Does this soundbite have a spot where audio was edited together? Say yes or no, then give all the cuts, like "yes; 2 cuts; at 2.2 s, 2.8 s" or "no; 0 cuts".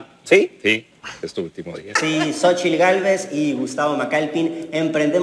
yes; 1 cut; at 1.9 s